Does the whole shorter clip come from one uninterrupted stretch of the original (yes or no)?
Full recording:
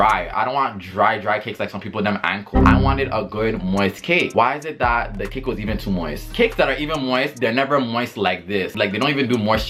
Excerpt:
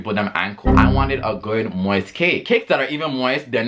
no